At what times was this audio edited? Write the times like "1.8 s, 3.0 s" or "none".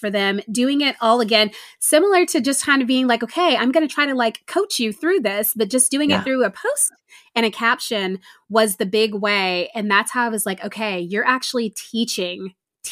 none